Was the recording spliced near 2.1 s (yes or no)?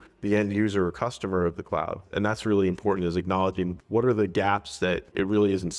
yes